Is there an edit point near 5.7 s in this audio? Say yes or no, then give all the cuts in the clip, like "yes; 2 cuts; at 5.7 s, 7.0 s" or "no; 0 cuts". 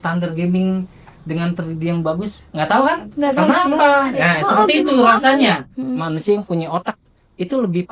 yes; 1 cut; at 5.7 s